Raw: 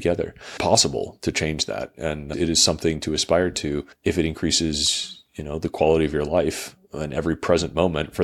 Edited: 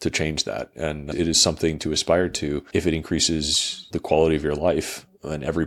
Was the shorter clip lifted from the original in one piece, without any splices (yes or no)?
no